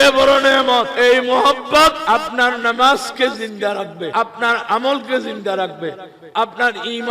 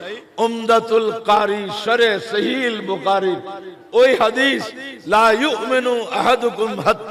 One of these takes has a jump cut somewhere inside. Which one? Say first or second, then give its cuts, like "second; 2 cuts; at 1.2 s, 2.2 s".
first; 3 cuts; at 0.9 s, 2.0 s, 4.1 s